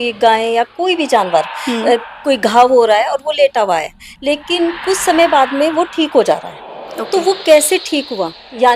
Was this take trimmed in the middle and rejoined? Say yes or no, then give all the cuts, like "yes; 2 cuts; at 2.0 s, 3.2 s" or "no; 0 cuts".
no; 0 cuts